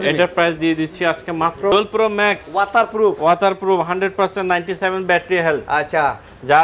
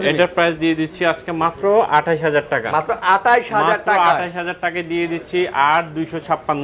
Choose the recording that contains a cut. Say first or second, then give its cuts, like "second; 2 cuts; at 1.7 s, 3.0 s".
first; 1 cut; at 1.7 s